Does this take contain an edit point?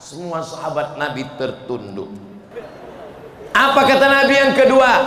yes; 1 cut; at 2.4 s

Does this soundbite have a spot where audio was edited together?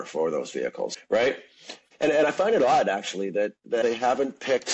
yes; 3 cuts; at 1.0 s, 1.8 s, 3.8 s

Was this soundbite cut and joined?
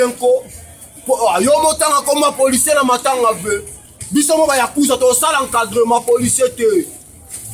no; 0 cuts

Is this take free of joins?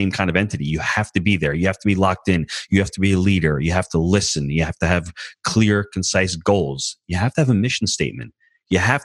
yes; 0 cuts

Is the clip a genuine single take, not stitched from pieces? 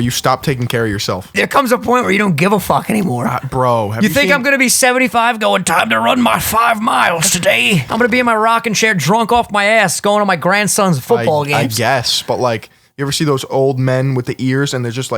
no; 3 cuts; at 1.3 s, 7.9 s, 13.5 s

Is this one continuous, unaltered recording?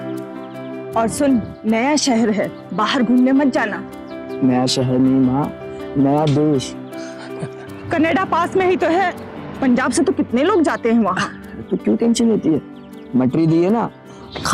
no; 1 cut; at 0.9 s

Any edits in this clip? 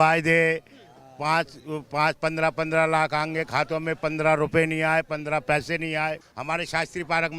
yes; 1 cut; at 6.3 s

